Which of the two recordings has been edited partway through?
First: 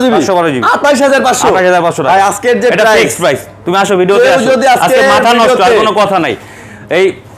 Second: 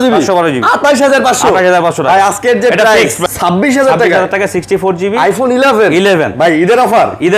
second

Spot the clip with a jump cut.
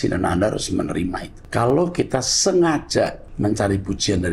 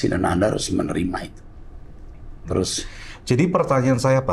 first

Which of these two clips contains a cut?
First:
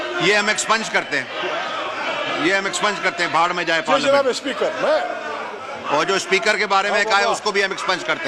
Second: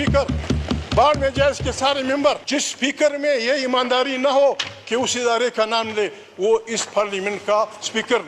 second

